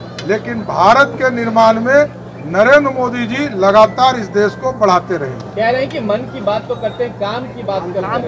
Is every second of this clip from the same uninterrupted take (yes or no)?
yes